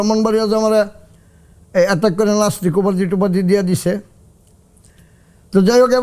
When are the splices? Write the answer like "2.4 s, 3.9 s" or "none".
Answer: none

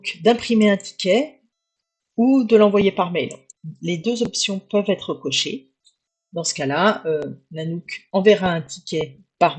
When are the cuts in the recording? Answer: 3.4 s

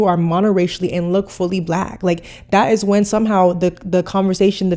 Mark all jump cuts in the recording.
none

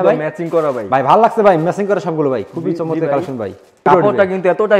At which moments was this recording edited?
3.8 s

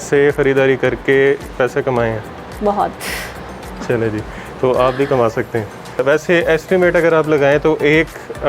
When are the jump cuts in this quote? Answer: 6.0 s

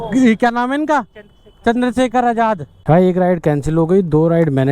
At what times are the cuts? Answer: 2.7 s

